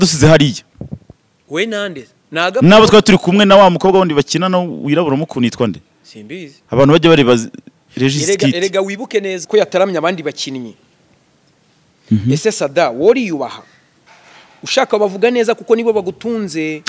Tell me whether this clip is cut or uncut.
cut